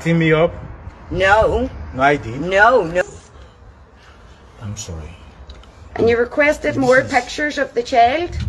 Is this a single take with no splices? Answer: no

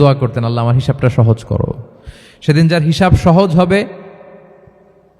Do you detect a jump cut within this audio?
no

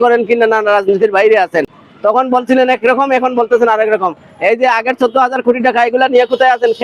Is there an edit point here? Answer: no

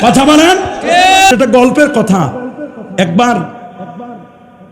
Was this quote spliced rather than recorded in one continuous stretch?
yes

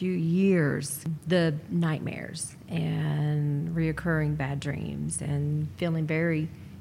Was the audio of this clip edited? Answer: yes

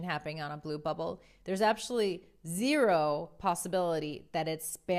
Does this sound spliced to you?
no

